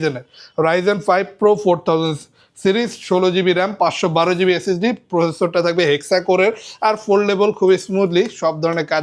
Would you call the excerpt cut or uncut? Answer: uncut